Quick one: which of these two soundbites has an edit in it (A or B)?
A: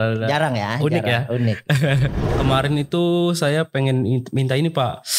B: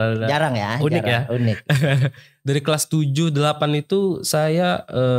A